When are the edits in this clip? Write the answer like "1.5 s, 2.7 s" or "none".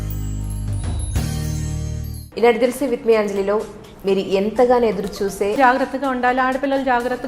2.2 s, 5.6 s